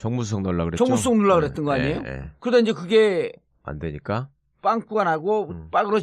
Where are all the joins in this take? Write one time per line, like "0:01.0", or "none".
0:01.2